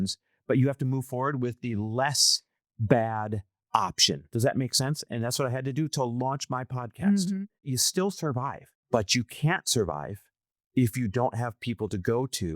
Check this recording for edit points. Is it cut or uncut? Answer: cut